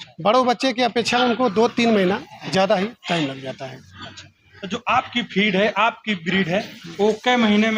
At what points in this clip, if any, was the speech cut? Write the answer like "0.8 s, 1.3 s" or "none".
none